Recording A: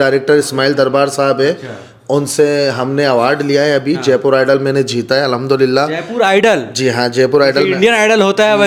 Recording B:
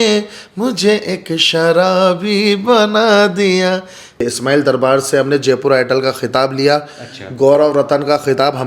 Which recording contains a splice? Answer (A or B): B